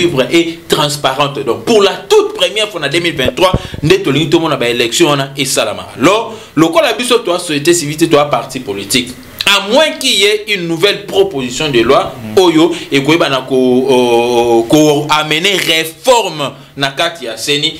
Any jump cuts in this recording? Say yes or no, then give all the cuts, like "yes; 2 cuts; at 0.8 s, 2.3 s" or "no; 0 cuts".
no; 0 cuts